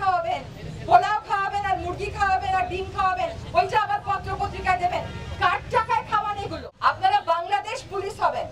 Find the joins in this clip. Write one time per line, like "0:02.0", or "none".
0:06.6